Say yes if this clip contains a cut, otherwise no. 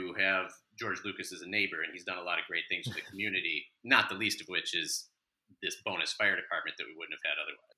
no